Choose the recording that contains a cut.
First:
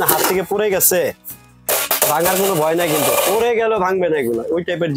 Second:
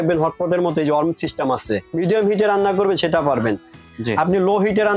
second; 2 cuts; at 1.8 s, 3.9 s

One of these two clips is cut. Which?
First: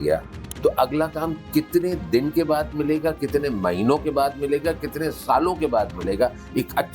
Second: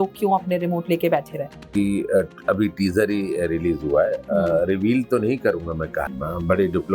second; 2 cuts; at 1.7 s, 6.0 s

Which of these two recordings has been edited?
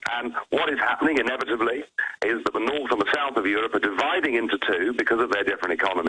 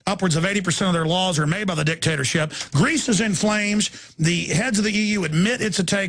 first; 1 cut; at 1.3 s

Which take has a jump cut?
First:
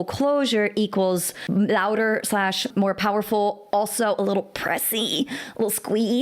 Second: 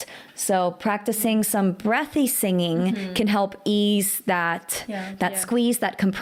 first; 2 cuts; at 1.3 s, 2.7 s

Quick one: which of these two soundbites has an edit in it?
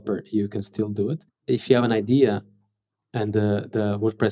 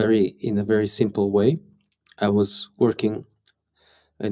first; 1 cut; at 1.3 s

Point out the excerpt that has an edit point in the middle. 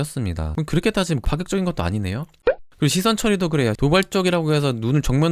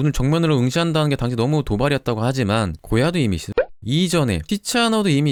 first; 2 cuts; at 2.4 s, 3.8 s

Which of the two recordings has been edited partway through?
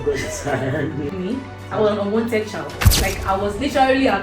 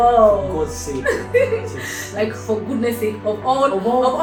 first; 1 cut; at 1.1 s

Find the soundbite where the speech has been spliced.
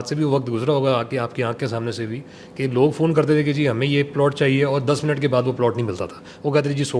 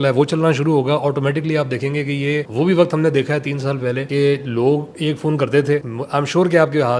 second; 3 cuts; at 2.5 s, 4.0 s, 6.0 s

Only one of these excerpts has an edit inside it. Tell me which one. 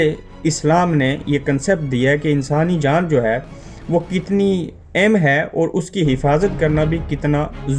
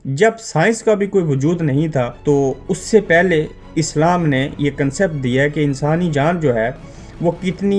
second; 1 cut; at 2.1 s

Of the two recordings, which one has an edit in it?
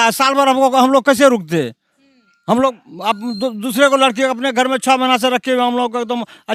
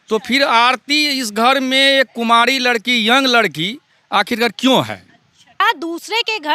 second; 1 cut; at 5.6 s

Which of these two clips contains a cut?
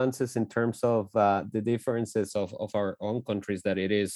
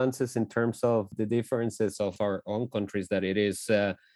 second; 2 cuts; at 1.1 s, 2.2 s

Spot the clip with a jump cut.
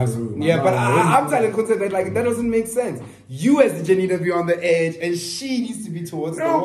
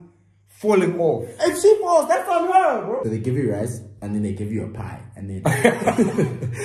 second; 1 cut; at 3.0 s

